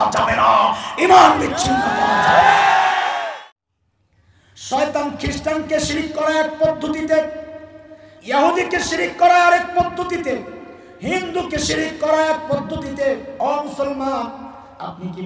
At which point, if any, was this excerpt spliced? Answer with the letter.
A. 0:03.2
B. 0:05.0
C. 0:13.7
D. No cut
A